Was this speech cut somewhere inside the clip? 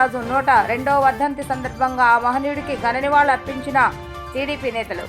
no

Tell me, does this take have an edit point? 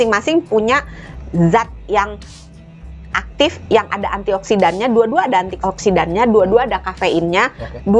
no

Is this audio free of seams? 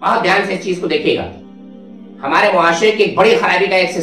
yes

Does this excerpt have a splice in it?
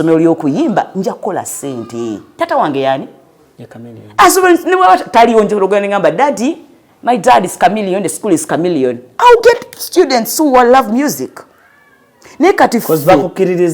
no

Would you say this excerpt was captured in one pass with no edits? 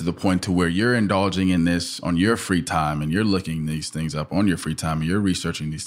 yes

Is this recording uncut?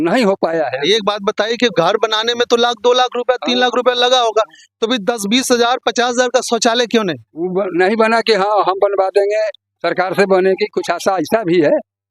yes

